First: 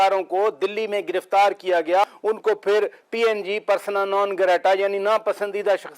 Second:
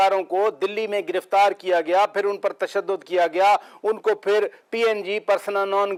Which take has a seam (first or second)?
first